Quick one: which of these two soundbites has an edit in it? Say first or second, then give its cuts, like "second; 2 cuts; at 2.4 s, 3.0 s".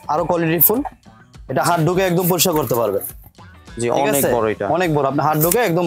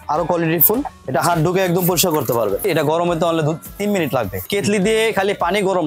second; 3 cuts; at 1.0 s, 2.6 s, 4.5 s